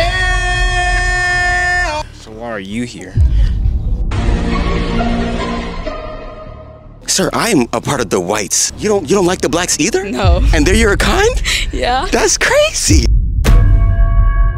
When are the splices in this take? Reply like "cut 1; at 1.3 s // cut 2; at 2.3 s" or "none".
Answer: cut 1; at 2.0 s // cut 2; at 8.6 s // cut 3; at 13.1 s